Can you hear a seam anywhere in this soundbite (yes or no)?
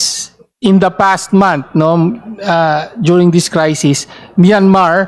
no